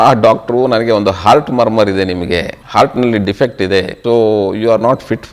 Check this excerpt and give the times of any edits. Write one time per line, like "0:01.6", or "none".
0:02.6
0:03.9